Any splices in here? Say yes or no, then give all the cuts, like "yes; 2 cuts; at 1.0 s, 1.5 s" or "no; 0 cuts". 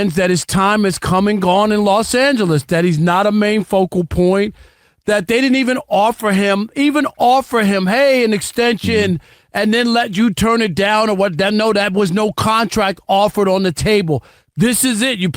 no; 0 cuts